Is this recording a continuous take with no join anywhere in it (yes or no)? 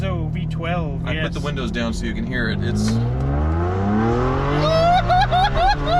yes